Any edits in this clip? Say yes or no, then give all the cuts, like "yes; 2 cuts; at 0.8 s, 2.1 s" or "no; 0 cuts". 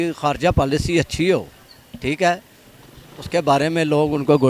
no; 0 cuts